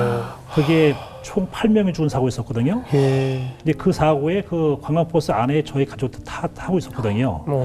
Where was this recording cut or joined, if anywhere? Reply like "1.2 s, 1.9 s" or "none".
3.5 s